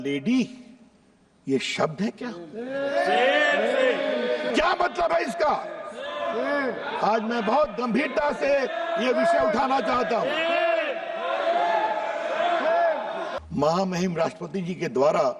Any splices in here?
yes; 2 cuts; at 4.5 s, 13.3 s

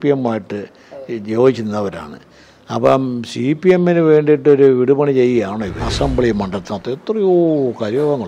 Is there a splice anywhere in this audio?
yes; 1 cut; at 5.8 s

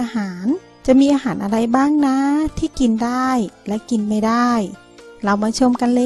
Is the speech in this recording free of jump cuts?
yes; 0 cuts

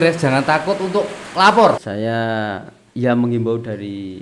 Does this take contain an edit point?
yes; 1 cut; at 1.8 s

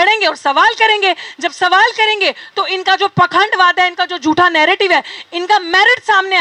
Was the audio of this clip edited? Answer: no; 0 cuts

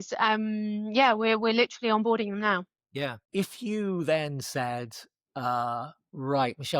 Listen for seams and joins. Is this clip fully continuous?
no; 1 cut; at 3.2 s

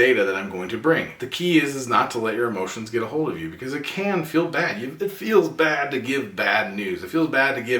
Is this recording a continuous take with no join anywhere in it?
no; 1 cut; at 1.2 s

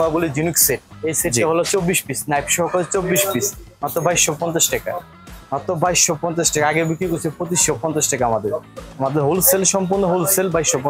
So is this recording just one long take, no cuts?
yes; 0 cuts

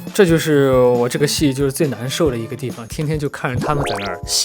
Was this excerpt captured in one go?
no; 1 cut; at 2.8 s

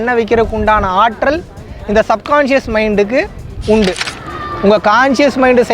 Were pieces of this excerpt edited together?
yes; 1 cut; at 4.0 s

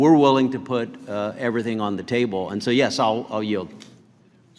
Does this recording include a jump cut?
no; 0 cuts

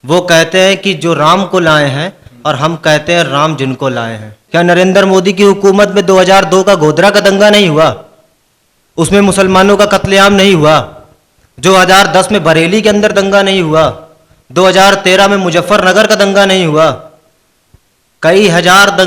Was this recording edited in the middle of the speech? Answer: yes; 1 cut; at 4.4 s

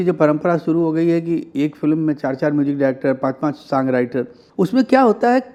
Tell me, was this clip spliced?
no; 0 cuts

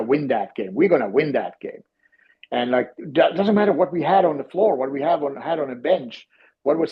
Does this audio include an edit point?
no; 0 cuts

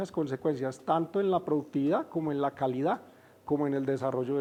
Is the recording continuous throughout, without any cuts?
yes; 0 cuts

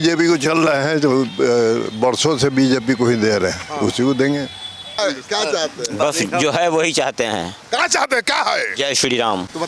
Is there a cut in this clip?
no; 0 cuts

